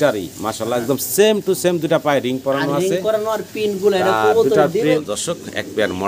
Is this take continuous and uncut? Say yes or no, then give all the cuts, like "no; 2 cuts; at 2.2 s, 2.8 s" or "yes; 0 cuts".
no; 1 cut; at 5.0 s